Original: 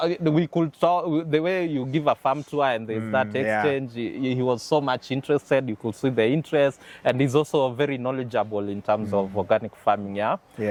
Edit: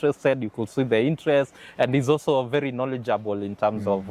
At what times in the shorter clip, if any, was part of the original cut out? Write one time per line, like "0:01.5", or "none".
none